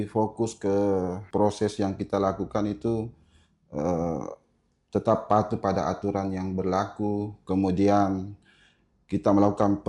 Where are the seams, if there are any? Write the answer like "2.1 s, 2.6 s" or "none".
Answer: 1.2 s

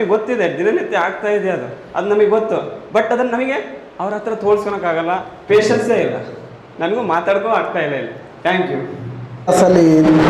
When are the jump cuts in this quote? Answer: none

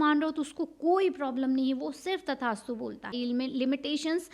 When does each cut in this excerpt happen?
3.1 s

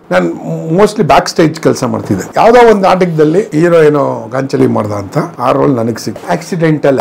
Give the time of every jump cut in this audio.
2.2 s, 3.5 s, 5.3 s, 6.2 s

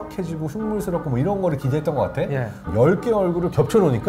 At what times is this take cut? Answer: none

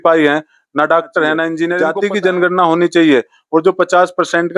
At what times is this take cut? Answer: 1.8 s

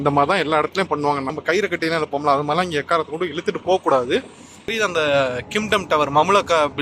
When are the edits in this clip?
1.3 s, 4.7 s

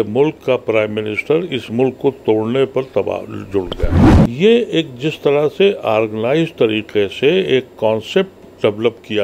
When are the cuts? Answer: 4.0 s

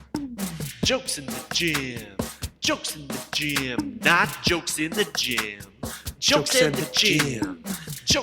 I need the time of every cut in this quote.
none

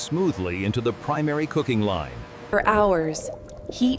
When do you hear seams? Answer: 2.4 s

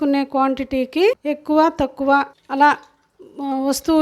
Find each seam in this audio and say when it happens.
1.2 s, 2.4 s

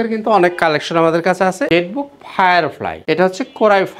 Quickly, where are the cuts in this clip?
1.7 s, 3.0 s

